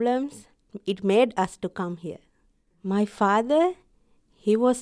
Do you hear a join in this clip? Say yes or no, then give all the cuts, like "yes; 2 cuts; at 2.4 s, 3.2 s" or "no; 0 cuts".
no; 0 cuts